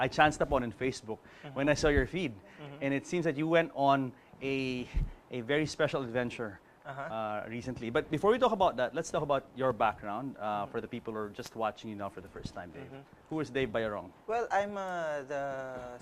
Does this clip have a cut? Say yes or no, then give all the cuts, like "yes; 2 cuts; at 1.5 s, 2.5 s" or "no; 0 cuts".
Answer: yes; 1 cut; at 6.2 s